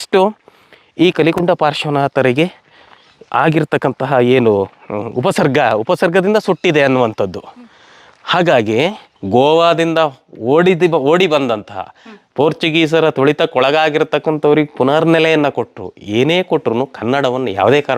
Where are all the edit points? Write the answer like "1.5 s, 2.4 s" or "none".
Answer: 9.1 s

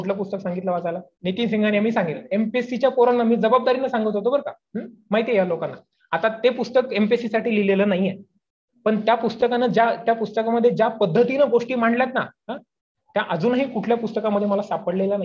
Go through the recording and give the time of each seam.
1.1 s

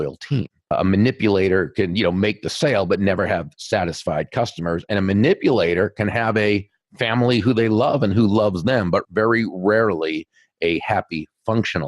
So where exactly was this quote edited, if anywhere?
0.7 s, 9.1 s

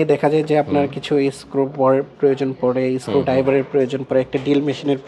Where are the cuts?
none

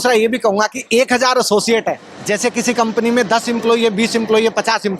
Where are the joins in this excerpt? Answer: 2.1 s

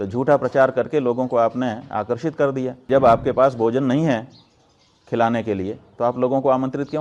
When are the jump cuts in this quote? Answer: 2.8 s

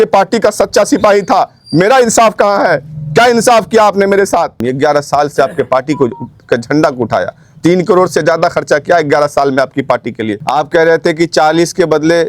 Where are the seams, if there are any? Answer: 4.7 s, 10.3 s

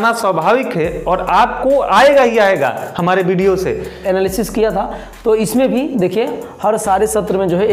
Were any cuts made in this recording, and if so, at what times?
4.0 s

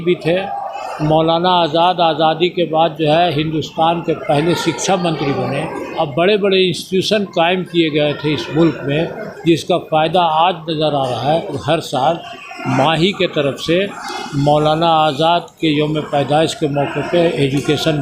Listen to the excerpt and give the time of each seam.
5.9 s, 11.6 s

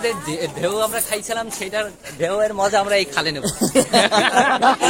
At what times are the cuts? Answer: none

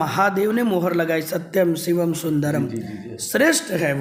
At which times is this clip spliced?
none

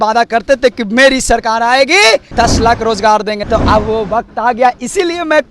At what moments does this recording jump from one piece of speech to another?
2.3 s, 3.4 s

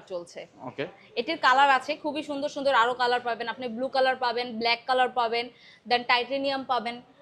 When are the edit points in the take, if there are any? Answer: none

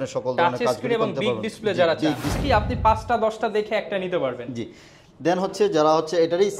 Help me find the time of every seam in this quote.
2.4 s

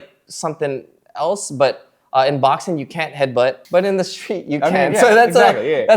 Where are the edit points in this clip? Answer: 3.6 s

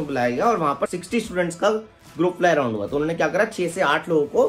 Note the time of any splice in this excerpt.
0.9 s

